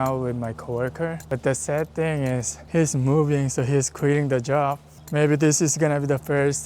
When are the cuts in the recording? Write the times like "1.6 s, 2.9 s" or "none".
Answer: 1.2 s, 2.5 s, 4.9 s